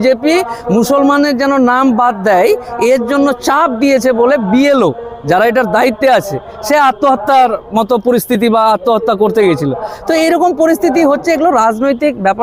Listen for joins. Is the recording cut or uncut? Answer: uncut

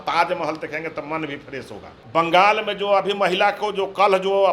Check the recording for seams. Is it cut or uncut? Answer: cut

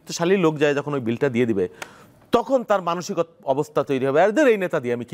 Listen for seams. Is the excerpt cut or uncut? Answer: uncut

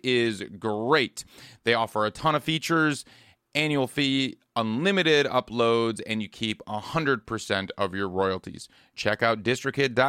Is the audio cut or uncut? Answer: uncut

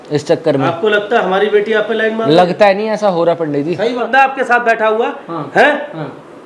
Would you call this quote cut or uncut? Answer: cut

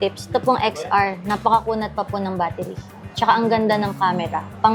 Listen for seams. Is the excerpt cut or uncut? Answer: uncut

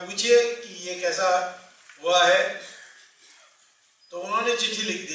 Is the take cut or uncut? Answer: uncut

